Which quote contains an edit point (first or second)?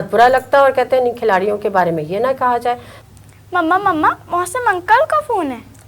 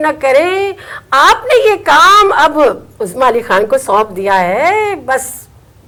first